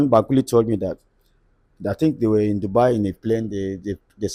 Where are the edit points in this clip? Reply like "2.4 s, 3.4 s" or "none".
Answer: none